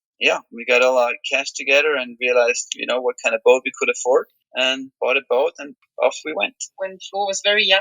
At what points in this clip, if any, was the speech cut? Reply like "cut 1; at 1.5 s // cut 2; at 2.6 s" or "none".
cut 1; at 6.6 s